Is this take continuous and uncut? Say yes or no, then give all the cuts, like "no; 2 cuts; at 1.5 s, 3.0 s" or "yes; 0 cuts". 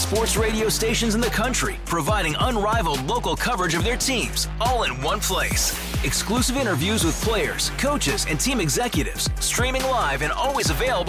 yes; 0 cuts